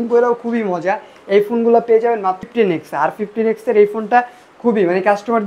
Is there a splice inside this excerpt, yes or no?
yes